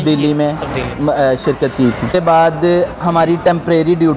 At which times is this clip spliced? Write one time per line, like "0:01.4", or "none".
0:02.1